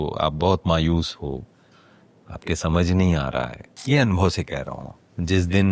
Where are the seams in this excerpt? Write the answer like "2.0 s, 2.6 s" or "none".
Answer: 3.7 s